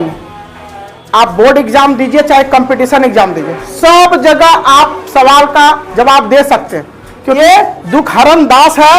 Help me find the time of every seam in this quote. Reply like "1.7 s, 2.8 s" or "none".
7.4 s

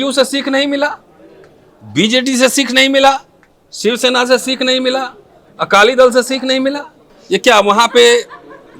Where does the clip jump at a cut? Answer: none

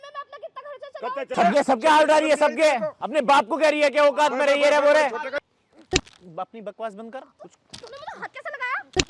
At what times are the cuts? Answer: 1.3 s, 5.4 s, 7.4 s

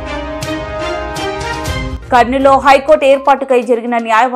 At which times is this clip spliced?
1.9 s

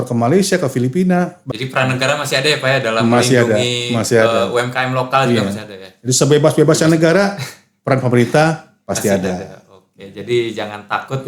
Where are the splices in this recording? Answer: 1.4 s

